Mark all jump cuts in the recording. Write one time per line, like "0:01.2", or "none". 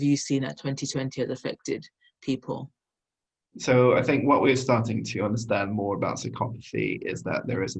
0:03.0